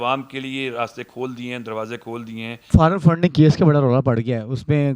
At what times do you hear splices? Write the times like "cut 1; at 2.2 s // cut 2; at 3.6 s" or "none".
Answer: cut 1; at 2.6 s